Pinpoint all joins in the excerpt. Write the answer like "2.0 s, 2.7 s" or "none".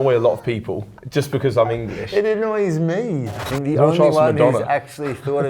3.3 s